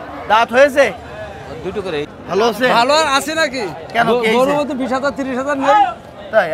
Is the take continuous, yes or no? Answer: no